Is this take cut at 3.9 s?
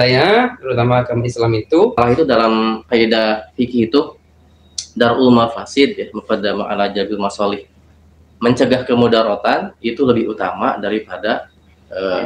no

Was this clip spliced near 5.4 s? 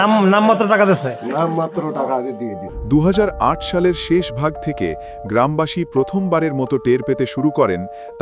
no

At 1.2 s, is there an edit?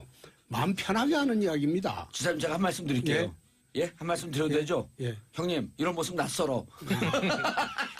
yes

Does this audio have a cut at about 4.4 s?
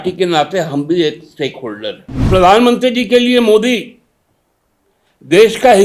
no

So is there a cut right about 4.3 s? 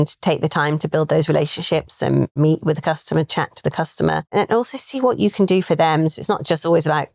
yes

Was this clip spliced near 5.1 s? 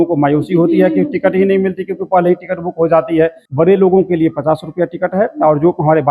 no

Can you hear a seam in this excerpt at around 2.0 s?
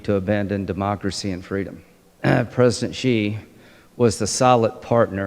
yes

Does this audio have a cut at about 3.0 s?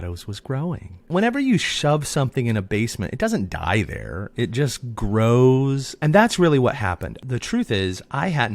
no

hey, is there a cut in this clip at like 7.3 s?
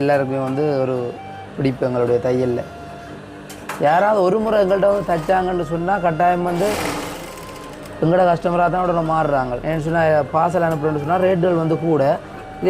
no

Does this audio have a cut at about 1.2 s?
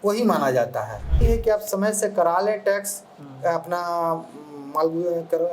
yes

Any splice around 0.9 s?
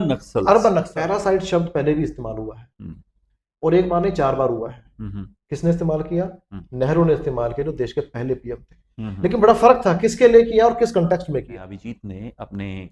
yes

